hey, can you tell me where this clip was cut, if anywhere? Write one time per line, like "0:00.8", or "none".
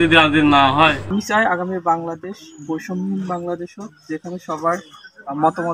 0:01.2